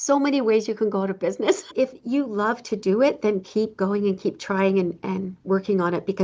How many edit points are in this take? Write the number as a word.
one